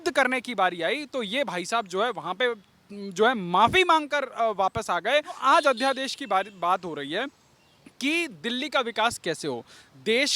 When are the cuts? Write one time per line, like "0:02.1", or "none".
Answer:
0:05.4

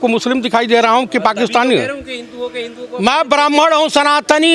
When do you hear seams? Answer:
none

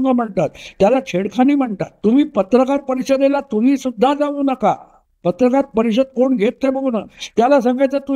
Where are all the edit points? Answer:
0:01.8

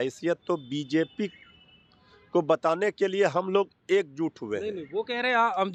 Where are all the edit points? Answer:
none

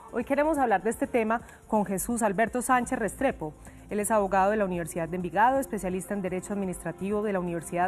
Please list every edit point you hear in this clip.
0:04.9

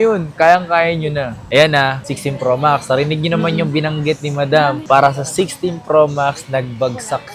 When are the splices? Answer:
0:01.4

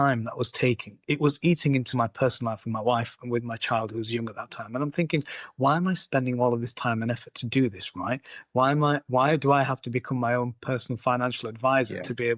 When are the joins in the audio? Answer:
none

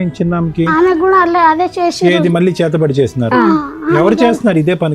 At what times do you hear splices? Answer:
none

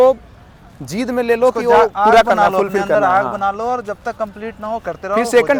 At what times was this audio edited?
none

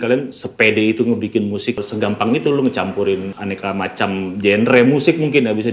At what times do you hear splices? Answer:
0:01.8
0:03.3

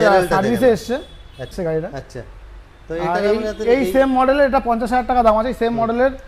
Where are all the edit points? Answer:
0:01.5

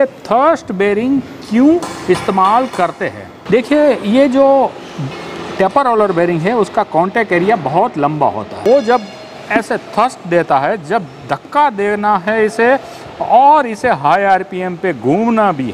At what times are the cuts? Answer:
0:03.3
0:08.5

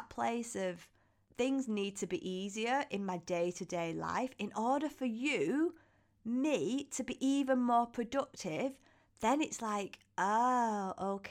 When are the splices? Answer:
0:01.2

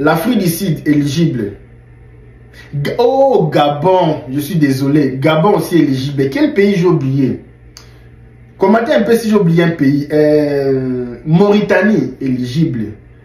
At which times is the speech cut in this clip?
none

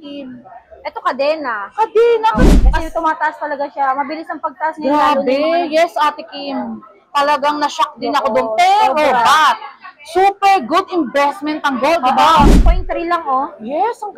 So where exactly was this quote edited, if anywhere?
0:02.5
0:12.6

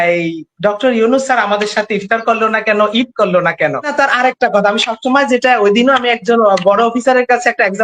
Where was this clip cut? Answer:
0:03.9

